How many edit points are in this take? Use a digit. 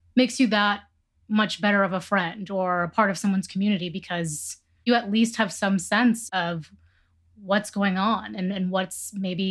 0